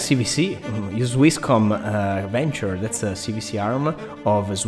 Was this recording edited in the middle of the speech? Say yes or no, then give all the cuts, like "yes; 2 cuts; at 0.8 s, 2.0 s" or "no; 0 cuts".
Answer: no; 0 cuts